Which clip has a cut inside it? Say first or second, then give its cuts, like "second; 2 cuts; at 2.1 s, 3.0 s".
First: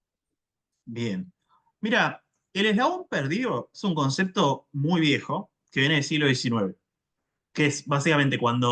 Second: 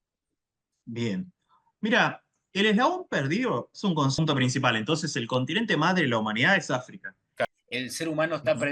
second; 2 cuts; at 4.2 s, 7.5 s